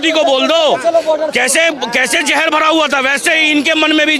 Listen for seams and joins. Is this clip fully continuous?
yes; 0 cuts

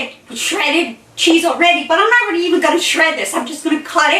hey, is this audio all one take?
yes; 0 cuts

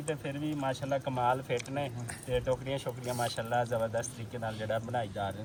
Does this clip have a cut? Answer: no; 0 cuts

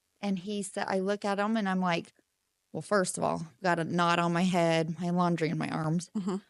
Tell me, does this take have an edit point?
no; 0 cuts

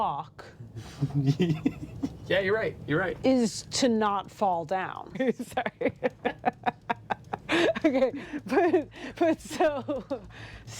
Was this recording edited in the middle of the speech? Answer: yes; 1 cut; at 5.1 s

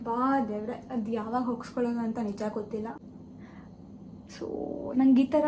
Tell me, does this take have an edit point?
yes; 1 cut; at 2.9 s

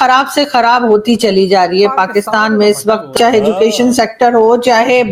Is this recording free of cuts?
no; 1 cut; at 3.1 s

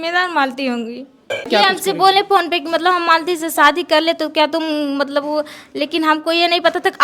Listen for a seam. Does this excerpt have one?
yes; 1 cut; at 1.5 s

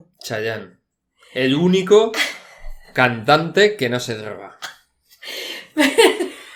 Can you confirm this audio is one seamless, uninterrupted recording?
yes; 0 cuts

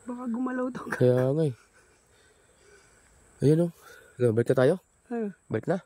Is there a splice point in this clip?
no; 0 cuts

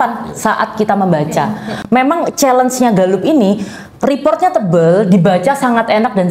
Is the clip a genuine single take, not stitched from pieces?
yes; 0 cuts

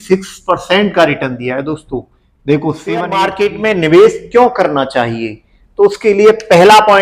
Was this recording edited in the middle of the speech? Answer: yes; 1 cut; at 3.1 s

